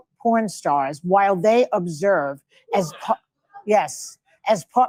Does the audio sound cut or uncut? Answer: uncut